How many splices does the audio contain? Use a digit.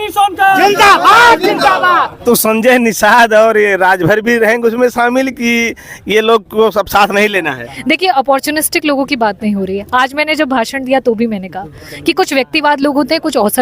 1